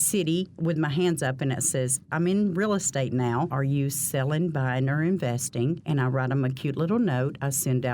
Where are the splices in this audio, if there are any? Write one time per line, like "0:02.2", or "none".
0:02.0
0:03.5
0:05.8